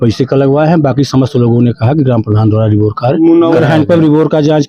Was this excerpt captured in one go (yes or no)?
no